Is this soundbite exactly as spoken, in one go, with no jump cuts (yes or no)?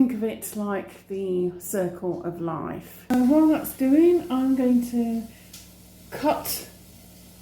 no